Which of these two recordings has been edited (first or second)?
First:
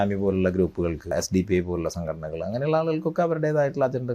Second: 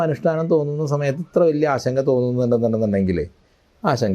first